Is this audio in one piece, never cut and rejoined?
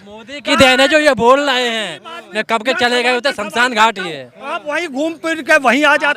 yes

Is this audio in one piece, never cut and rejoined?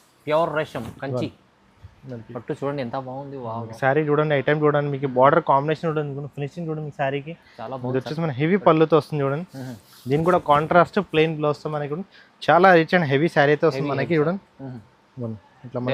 yes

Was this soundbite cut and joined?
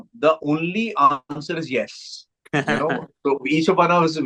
no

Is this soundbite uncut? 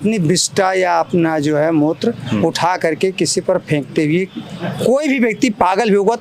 yes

